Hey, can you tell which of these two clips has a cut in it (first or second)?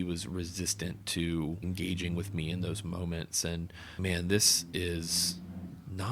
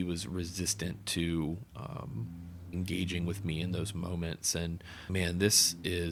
first